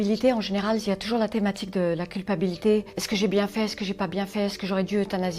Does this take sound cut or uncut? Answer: cut